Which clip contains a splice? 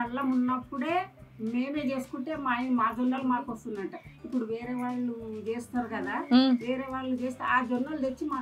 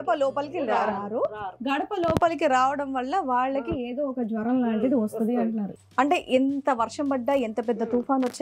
second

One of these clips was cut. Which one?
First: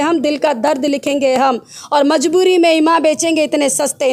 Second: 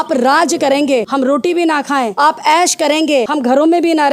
second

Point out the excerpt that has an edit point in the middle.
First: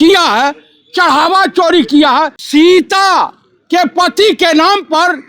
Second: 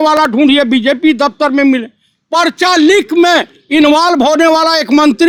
first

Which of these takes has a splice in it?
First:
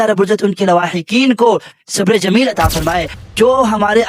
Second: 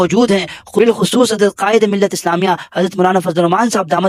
first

